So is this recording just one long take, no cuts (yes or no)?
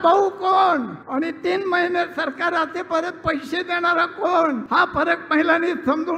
no